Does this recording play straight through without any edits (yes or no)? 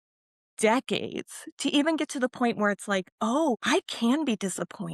no